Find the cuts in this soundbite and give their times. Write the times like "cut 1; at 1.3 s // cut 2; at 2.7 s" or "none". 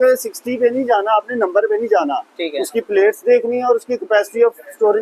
none